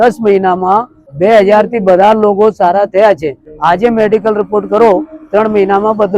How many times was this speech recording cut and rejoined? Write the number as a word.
two